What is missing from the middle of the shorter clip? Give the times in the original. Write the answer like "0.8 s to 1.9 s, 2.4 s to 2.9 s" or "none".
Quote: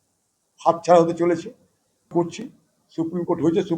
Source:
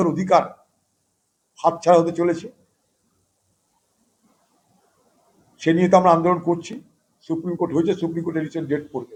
3.1 s to 6.4 s

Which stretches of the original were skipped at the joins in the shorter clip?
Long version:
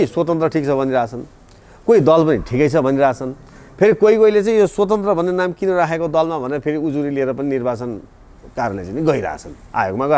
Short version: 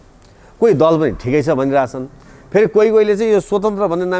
none

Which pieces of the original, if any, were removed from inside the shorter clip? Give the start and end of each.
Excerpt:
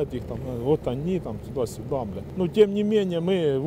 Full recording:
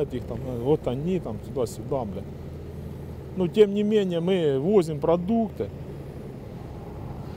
2.2 s to 3.2 s

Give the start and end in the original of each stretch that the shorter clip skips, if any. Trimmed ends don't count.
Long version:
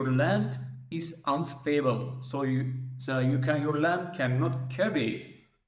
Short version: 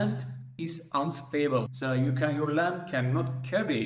2.1 s to 3.0 s

